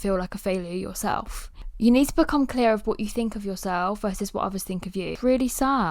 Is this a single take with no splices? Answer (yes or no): no